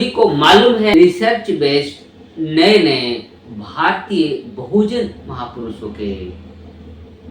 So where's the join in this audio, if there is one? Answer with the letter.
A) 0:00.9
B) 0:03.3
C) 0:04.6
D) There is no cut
A